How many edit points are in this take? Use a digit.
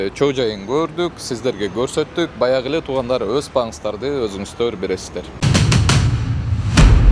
1